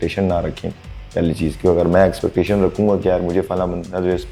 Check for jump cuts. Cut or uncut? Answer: uncut